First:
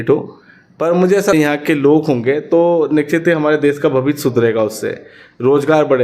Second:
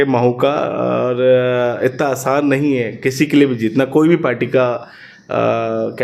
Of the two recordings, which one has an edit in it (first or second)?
first